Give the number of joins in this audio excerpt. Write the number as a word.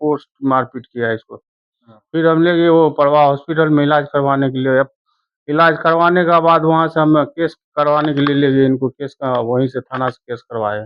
zero